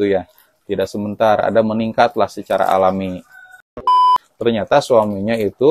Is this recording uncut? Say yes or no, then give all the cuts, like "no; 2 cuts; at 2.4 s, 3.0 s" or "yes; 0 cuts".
no; 1 cut; at 4.0 s